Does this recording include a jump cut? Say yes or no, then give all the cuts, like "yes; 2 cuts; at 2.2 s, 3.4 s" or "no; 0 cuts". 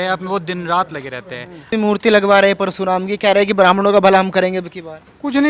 yes; 1 cut; at 1.7 s